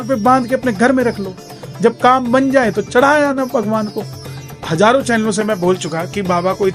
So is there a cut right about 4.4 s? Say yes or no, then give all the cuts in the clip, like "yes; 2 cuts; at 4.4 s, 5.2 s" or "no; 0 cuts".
yes; 1 cut; at 4.4 s